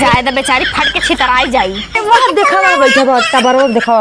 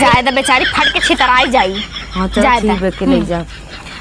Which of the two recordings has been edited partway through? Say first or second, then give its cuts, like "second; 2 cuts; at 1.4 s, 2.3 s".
first; 1 cut; at 2.0 s